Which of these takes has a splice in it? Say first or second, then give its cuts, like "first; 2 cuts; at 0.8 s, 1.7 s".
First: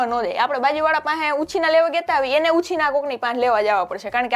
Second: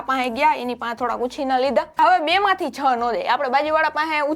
second; 1 cut; at 2.0 s